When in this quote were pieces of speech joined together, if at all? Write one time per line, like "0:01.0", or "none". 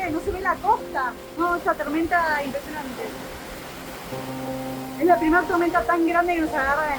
none